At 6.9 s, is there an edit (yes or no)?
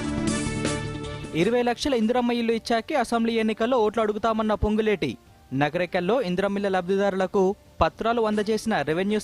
no